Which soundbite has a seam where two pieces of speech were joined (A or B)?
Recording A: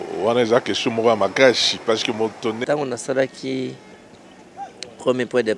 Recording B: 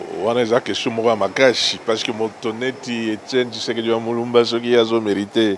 A